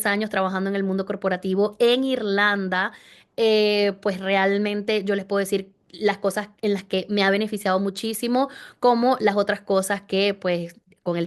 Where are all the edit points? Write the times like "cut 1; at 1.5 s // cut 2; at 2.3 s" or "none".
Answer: none